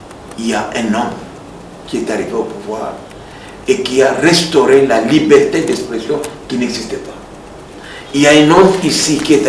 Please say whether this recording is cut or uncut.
uncut